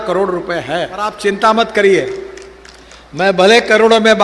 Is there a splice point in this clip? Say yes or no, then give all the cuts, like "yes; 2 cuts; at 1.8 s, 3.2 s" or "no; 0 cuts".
yes; 1 cut; at 1.1 s